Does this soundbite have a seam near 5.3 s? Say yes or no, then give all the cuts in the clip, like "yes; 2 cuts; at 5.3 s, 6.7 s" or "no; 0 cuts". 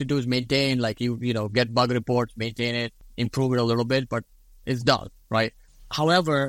no; 1 cut; at 3.0 s